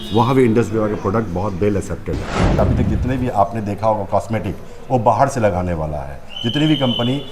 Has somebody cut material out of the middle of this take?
yes; 1 cut; at 2.5 s

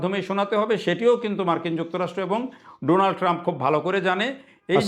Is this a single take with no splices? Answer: yes; 0 cuts

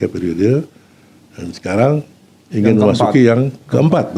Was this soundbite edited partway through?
no; 0 cuts

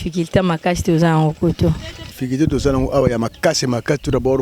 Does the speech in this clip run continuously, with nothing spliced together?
no; 1 cut; at 2.1 s

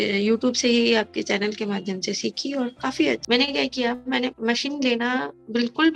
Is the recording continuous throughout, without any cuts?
no; 1 cut; at 3.2 s

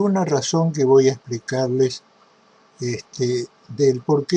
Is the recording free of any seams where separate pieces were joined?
yes; 0 cuts

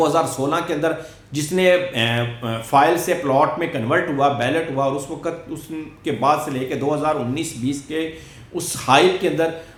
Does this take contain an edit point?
no; 0 cuts

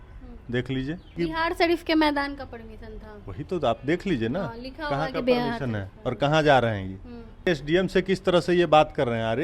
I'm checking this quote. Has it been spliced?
yes; 2 cuts; at 1.2 s, 7.5 s

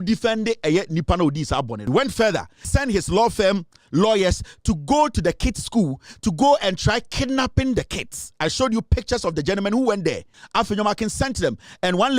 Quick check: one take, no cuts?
no; 3 cuts; at 1.8 s, 2.6 s, 10.3 s

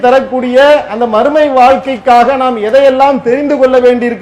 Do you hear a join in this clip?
no; 0 cuts

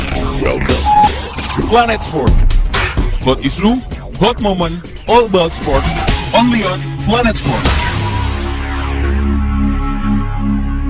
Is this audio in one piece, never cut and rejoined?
yes; 0 cuts

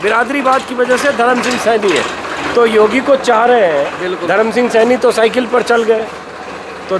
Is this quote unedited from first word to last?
yes; 0 cuts

